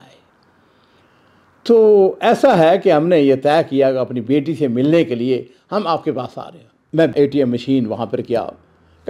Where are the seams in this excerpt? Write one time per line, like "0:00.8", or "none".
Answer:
0:06.7